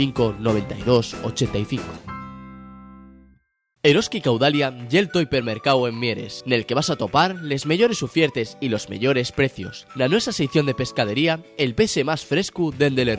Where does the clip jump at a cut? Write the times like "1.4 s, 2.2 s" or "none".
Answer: 3.8 s

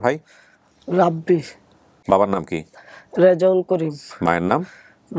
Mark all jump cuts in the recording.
2.0 s

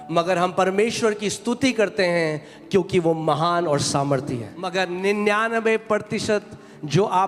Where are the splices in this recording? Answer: 4.6 s

